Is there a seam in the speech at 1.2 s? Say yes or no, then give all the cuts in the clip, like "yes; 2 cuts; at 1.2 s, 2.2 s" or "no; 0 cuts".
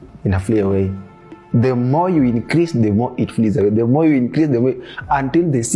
yes; 1 cut; at 1.2 s